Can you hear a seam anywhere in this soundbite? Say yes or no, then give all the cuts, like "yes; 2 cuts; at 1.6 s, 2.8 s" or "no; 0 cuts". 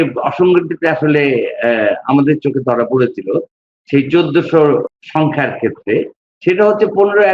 yes; 1 cut; at 4.9 s